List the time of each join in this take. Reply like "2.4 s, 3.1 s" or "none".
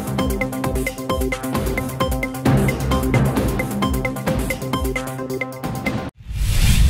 6.0 s